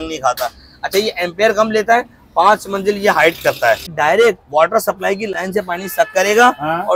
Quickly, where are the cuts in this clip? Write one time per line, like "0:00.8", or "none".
0:03.9